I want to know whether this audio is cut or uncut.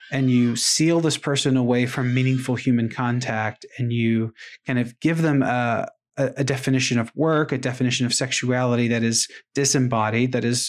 uncut